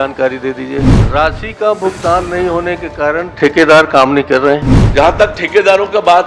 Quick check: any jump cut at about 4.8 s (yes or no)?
yes